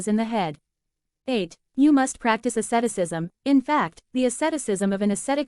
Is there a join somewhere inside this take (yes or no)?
yes